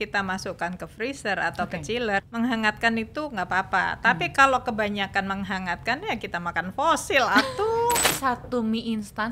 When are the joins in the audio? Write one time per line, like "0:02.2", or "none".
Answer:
0:02.3
0:08.2